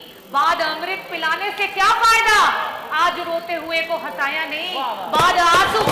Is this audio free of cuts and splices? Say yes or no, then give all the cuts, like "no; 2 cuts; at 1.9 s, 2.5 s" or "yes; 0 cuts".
yes; 0 cuts